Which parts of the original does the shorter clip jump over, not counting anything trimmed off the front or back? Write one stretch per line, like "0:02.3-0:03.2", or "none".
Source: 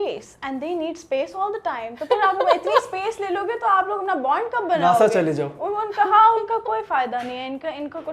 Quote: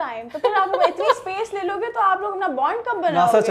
none